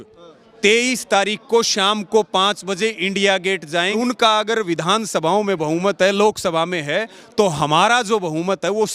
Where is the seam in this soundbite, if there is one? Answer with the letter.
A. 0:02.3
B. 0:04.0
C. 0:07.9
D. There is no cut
B